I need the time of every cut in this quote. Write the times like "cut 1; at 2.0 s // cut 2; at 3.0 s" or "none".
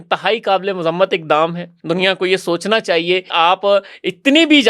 cut 1; at 1.7 s // cut 2; at 3.3 s

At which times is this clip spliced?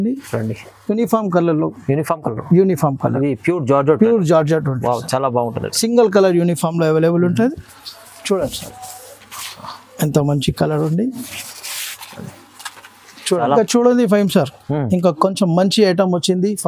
cut 1; at 13.4 s

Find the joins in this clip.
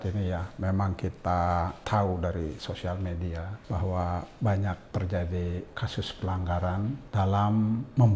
cut 1; at 1.8 s // cut 2; at 3.5 s // cut 3; at 4.8 s // cut 4; at 7.0 s

